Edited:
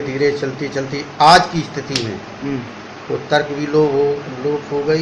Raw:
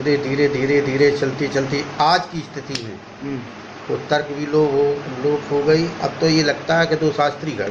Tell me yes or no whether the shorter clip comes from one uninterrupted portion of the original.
yes